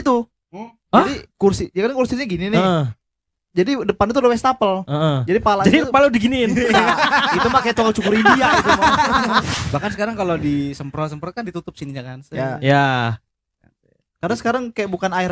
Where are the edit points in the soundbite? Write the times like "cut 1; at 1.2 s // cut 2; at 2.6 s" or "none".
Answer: cut 1; at 9.5 s